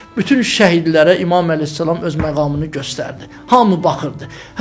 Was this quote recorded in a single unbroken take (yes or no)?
yes